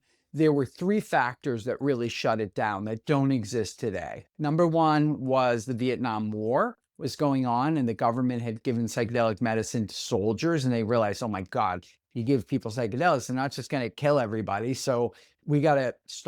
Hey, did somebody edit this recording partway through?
no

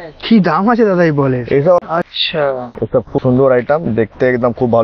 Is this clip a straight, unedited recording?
no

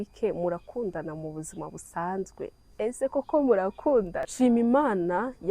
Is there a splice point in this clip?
yes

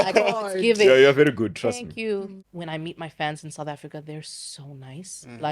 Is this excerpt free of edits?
no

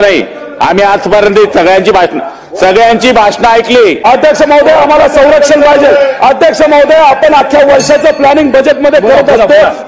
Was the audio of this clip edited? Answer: yes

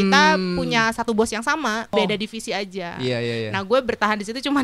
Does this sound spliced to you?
yes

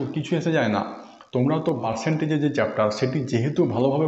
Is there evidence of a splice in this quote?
yes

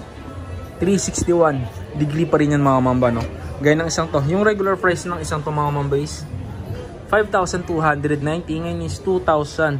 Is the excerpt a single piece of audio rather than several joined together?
yes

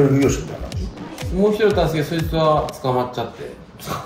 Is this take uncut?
yes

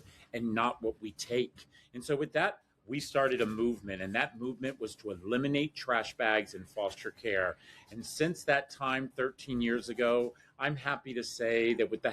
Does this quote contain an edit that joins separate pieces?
no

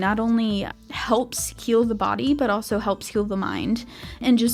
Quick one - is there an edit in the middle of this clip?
no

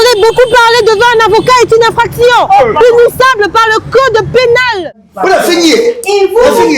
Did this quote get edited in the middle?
yes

